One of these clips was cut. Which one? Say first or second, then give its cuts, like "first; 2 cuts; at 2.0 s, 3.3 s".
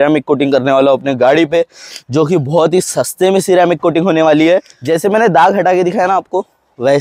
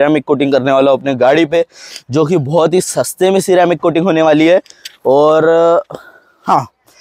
first; 1 cut; at 4.7 s